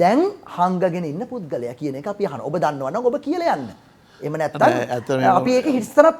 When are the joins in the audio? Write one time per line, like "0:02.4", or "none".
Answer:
none